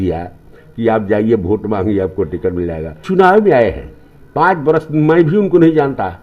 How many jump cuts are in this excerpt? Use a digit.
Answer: 1